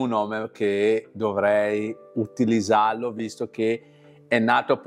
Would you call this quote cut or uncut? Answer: uncut